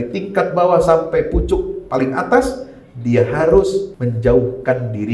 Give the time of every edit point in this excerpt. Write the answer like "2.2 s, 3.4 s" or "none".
3.9 s